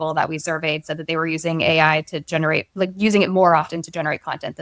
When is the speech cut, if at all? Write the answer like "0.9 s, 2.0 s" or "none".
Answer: none